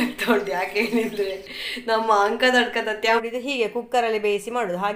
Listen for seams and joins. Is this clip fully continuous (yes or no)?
no